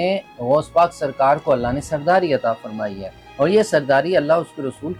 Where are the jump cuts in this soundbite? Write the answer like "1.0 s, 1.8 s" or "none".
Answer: none

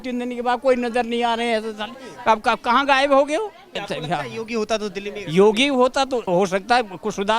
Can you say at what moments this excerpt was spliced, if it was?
3.8 s, 6.2 s

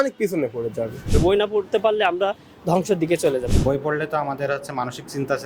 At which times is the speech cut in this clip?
1.1 s, 3.5 s

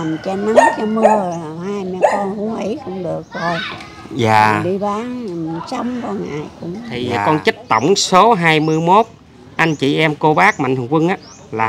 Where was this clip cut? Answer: 7.0 s

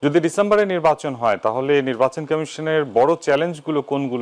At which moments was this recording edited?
none

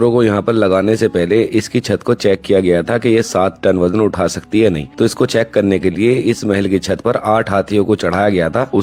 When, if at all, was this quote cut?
none

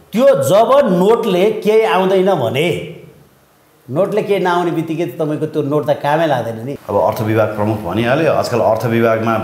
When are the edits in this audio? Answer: 6.7 s

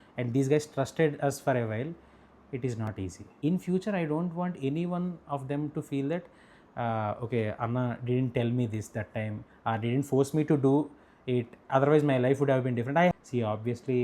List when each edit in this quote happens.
3.2 s, 13.1 s

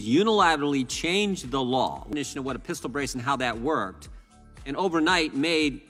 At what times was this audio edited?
none

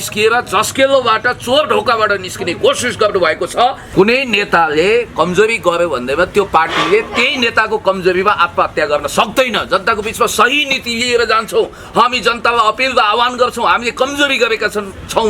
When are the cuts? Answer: 3.8 s

